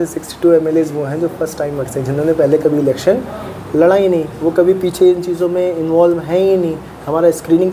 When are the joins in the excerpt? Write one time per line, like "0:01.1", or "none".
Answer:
none